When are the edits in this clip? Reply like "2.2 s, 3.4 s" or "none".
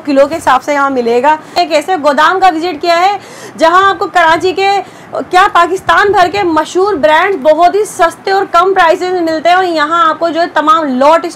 1.6 s